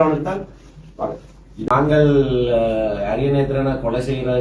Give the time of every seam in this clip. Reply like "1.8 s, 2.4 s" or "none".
1.7 s

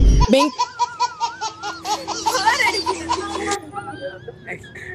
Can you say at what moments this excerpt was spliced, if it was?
none

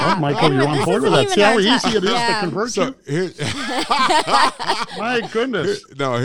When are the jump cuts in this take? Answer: none

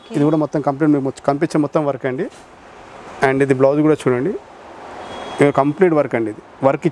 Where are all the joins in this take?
none

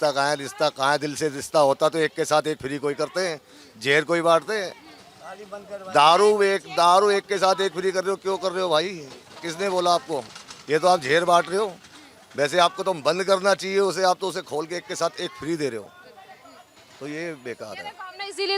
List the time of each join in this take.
none

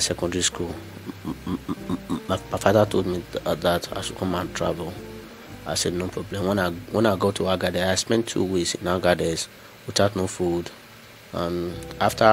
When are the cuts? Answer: none

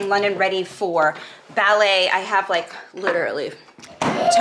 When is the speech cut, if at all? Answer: none

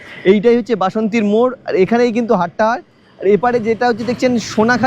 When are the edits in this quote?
none

